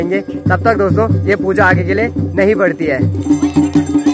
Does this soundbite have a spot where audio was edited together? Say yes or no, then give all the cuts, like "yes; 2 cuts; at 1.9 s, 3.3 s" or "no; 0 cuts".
yes; 1 cut; at 3.2 s